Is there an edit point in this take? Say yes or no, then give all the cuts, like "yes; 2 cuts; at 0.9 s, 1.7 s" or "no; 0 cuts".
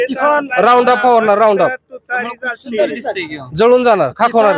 no; 0 cuts